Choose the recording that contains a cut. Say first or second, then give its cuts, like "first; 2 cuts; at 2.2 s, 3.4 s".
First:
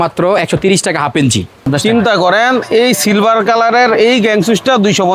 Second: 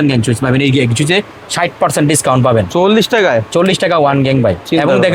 first; 1 cut; at 1.6 s